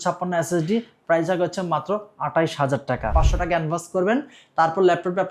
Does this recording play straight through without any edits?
no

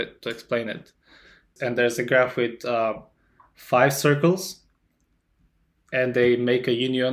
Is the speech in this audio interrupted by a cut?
yes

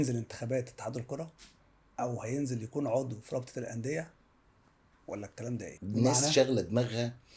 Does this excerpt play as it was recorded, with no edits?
no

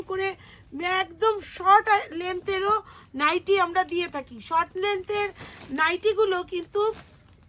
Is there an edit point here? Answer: no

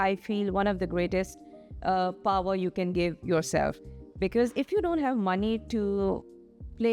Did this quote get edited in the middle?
no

